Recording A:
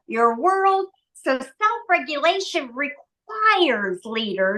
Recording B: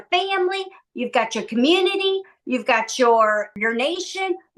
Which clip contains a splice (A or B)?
B